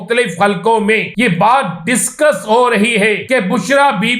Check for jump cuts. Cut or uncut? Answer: cut